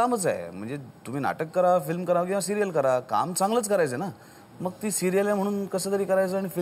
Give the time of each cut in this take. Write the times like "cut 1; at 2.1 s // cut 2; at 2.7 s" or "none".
none